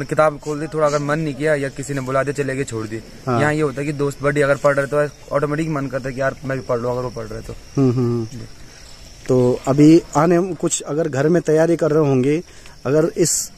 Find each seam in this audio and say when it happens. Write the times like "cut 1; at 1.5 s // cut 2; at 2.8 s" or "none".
none